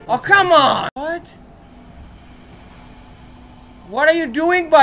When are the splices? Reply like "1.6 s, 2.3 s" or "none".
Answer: 0.9 s